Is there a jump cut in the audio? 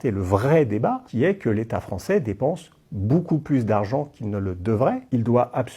no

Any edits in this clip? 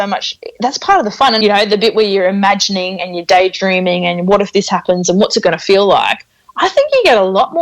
yes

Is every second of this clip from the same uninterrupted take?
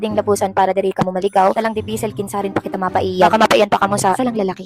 yes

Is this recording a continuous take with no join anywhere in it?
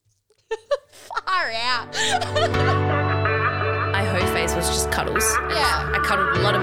no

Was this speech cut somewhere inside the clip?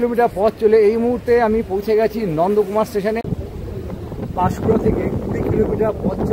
yes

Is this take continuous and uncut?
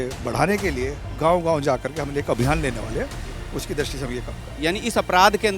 no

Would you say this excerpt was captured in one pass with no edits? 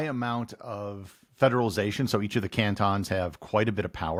yes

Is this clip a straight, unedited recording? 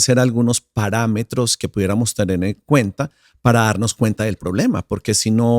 yes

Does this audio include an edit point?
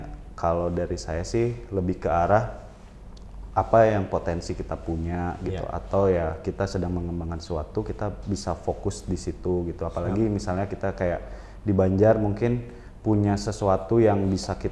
no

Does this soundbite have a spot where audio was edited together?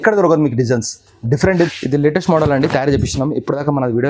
yes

